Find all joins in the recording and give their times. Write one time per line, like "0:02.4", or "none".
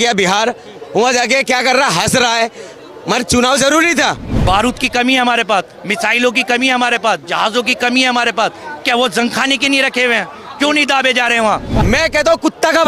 0:04.3
0:11.7

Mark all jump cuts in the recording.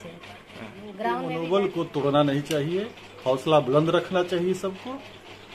0:01.2

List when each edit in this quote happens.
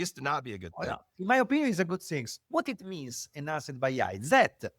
0:02.3

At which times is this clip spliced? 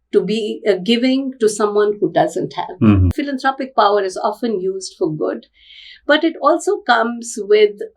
0:03.1

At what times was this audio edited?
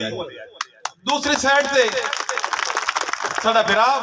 none

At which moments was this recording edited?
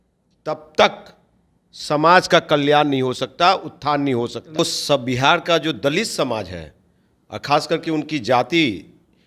0:04.6

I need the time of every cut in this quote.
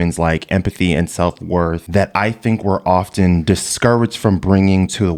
none

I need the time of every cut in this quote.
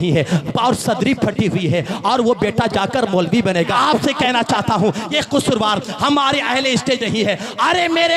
0:03.7

